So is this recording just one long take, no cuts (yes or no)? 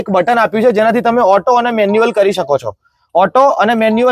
yes